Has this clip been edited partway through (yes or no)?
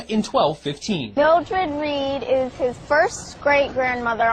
no